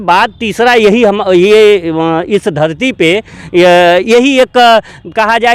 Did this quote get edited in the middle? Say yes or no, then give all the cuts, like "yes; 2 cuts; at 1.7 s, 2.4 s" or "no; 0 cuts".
no; 0 cuts